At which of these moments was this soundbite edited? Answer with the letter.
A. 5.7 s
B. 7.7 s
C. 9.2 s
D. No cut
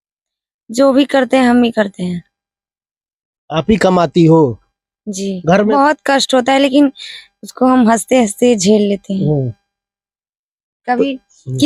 A